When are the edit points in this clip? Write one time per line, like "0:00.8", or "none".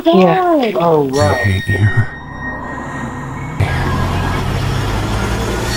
0:01.6

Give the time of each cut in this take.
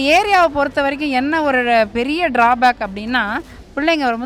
none

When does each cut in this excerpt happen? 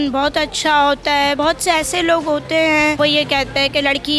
0:01.4
0:03.0

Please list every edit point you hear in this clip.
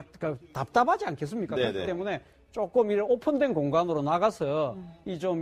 0:03.7

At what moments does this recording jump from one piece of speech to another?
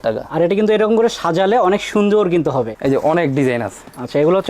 0:02.7

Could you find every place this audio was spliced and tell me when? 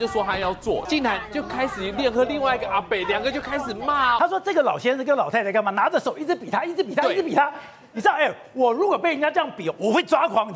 0:00.8
0:04.2

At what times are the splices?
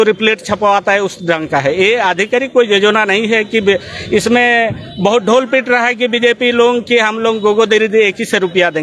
none

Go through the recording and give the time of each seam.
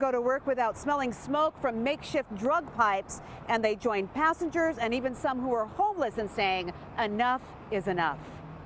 none

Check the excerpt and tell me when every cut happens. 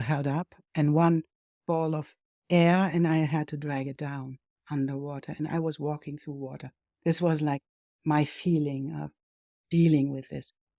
none

